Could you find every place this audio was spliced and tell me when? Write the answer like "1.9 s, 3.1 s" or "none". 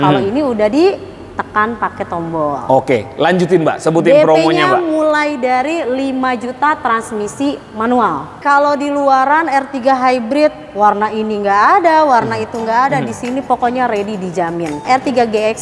8.4 s, 14.8 s

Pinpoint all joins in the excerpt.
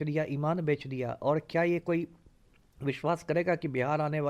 none

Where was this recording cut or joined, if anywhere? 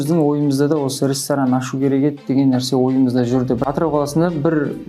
3.7 s

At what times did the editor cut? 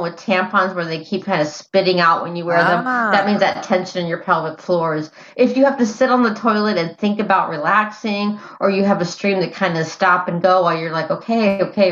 none

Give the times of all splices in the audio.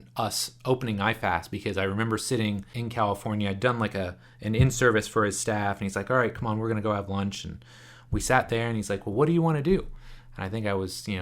2.8 s

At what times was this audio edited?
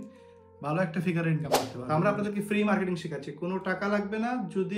1.7 s

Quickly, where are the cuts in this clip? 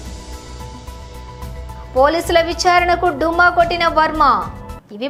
none

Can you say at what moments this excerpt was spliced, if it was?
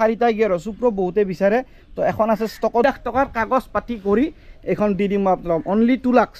2.8 s

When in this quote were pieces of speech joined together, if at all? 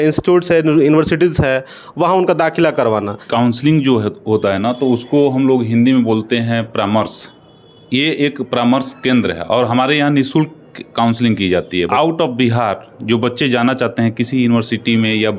3.2 s, 11.9 s

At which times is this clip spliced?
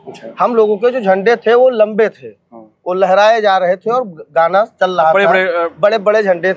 none

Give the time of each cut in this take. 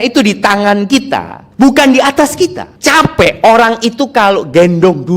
1.4 s, 2.7 s

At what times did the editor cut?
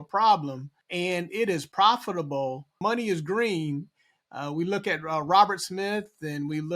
2.8 s

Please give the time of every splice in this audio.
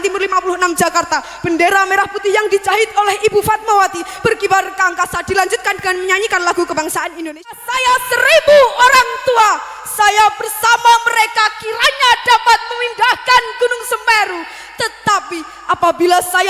7.5 s

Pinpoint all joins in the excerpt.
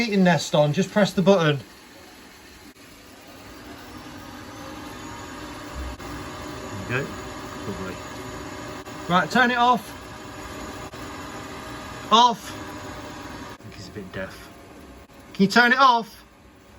2.7 s, 6.0 s, 8.8 s, 10.9 s, 13.6 s, 15.1 s

